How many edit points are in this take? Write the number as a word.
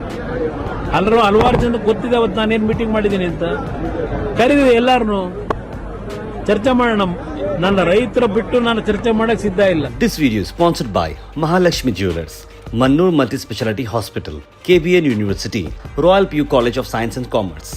one